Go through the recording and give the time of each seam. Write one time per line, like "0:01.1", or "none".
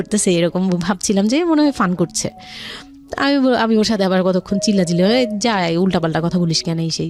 none